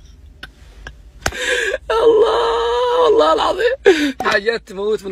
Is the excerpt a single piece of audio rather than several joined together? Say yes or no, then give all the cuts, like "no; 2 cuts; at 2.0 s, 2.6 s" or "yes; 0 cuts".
no; 1 cut; at 4.2 s